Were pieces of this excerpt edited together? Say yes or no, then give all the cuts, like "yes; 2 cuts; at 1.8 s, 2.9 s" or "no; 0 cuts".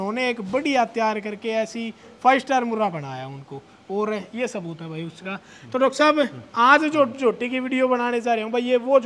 no; 0 cuts